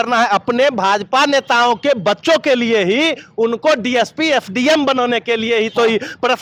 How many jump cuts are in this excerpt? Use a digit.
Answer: 0